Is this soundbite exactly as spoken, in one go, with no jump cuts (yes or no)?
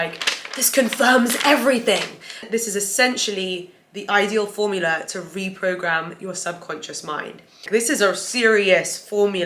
no